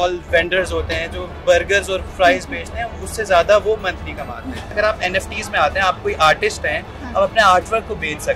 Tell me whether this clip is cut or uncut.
cut